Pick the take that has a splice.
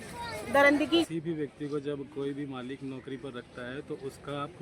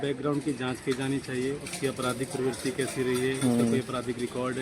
first; 1 cut; at 1.1 s

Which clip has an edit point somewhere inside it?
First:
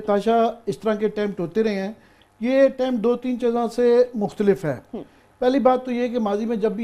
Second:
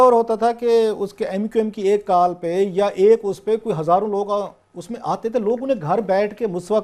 second; 1 cut; at 4.7 s

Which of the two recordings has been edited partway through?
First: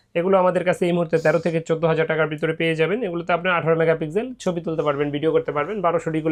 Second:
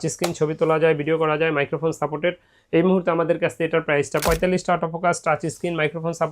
second; 1 cut; at 4.2 s

